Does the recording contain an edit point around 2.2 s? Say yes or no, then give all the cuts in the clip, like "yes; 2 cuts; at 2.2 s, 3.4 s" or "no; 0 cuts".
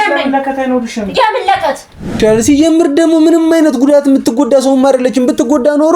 yes; 1 cut; at 2.2 s